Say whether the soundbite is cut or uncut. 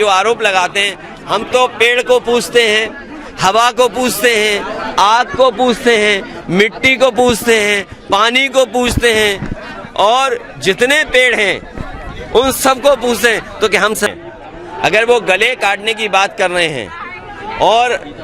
cut